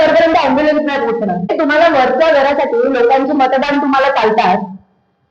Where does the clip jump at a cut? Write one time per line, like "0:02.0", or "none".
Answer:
0:01.5